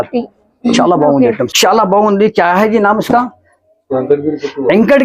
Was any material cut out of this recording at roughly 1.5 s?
yes; 1 cut; at 1.5 s

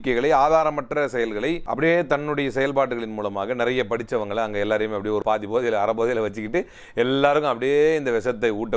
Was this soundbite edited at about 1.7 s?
yes; 2 cuts; at 1.7 s, 5.2 s

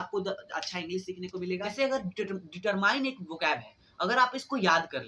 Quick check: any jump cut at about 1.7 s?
yes; 1 cut; at 1.7 s

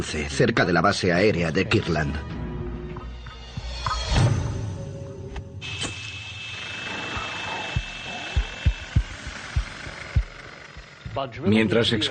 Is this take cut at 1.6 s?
yes; 1 cut; at 1.6 s

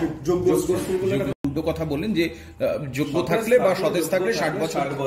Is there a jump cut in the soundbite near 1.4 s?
yes; 1 cut; at 1.4 s

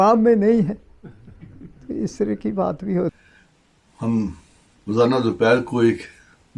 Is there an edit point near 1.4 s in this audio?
no; 1 cut; at 3.2 s

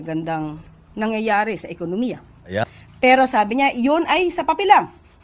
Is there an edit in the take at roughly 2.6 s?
yes; 1 cut; at 2.6 s

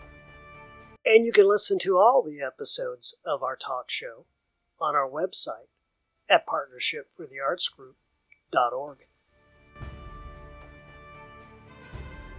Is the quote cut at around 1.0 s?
yes; 1 cut; at 1.0 s

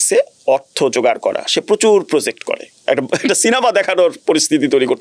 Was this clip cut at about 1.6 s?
no; 1 cut; at 2.8 s

